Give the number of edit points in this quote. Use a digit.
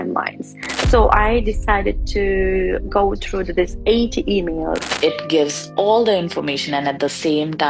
1